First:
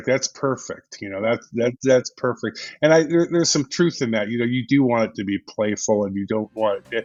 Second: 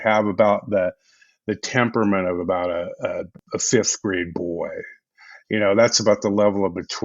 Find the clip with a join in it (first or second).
second